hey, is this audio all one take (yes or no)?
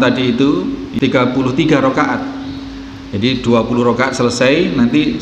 no